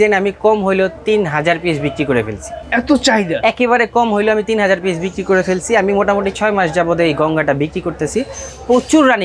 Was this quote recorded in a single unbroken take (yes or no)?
yes